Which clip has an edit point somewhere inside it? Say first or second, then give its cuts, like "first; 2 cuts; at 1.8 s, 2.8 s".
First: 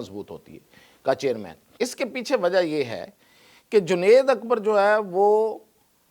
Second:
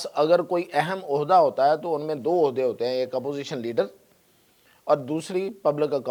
first; 1 cut; at 1.6 s